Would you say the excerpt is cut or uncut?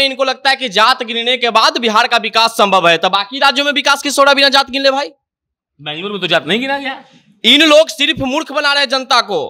uncut